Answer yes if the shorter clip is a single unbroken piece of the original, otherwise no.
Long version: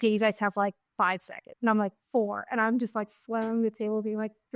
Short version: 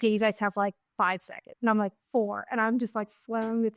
yes